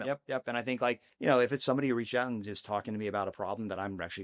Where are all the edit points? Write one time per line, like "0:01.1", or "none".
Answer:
0:01.1